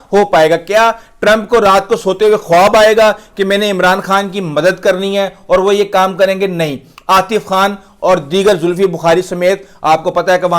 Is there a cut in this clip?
no; 0 cuts

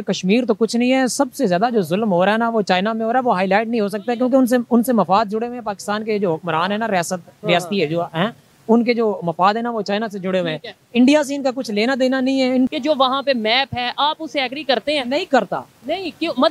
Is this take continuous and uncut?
no; 1 cut; at 12.7 s

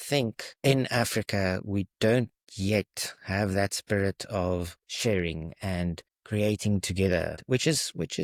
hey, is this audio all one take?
yes; 0 cuts

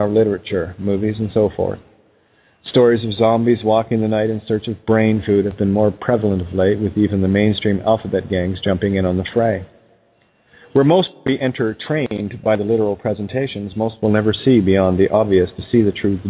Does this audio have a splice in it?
yes; 1 cut; at 8.0 s

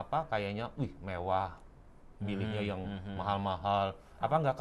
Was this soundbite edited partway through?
no; 0 cuts

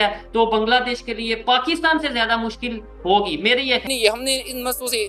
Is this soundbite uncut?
no; 1 cut; at 3.9 s

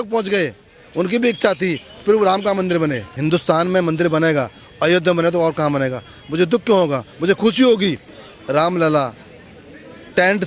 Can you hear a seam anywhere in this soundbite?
yes; 2 cuts; at 3.1 s, 8.1 s

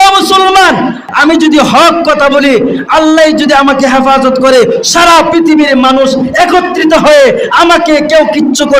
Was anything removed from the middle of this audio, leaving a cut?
yes; 1 cut; at 1.1 s

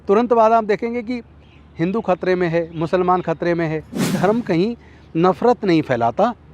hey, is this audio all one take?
no; 1 cut; at 4.1 s

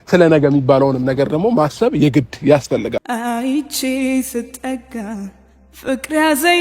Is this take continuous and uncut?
no; 1 cut; at 3.1 s

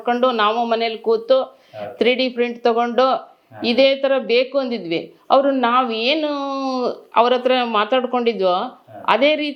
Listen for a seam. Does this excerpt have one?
no; 0 cuts

